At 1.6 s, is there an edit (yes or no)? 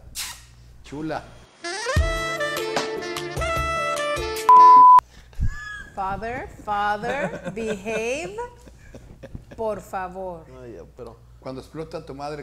no